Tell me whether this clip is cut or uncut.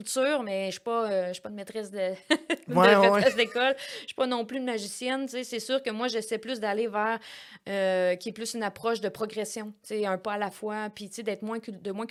uncut